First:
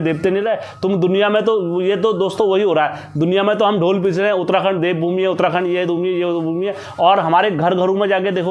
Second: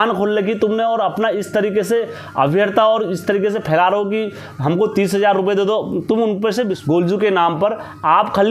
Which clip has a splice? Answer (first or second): second